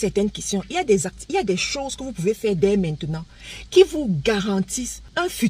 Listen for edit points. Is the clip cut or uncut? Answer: uncut